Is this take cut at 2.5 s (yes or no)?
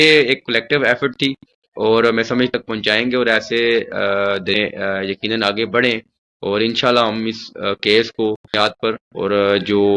yes